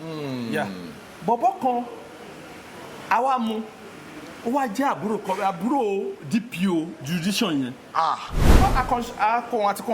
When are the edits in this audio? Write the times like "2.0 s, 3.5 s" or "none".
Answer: 8.6 s